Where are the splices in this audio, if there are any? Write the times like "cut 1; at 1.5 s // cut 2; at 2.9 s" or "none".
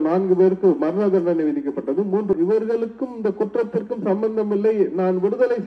cut 1; at 2.3 s